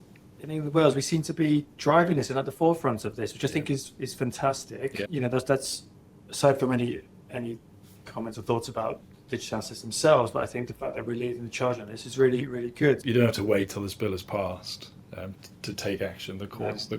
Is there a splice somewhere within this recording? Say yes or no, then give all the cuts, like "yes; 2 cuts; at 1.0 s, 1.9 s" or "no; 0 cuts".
yes; 2 cuts; at 5.1 s, 13.0 s